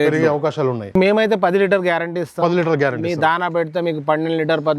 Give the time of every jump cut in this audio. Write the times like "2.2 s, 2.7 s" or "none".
1.0 s